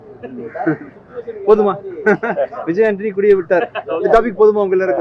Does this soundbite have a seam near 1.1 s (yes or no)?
no